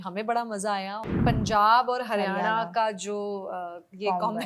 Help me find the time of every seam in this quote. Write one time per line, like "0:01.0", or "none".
0:01.1

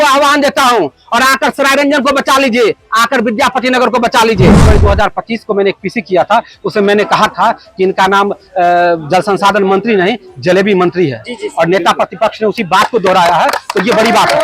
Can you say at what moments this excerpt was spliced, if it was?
0:04.7

